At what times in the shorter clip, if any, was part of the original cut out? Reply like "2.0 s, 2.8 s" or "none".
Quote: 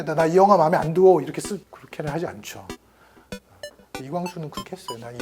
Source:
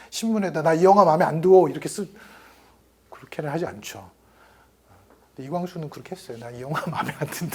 1.8 s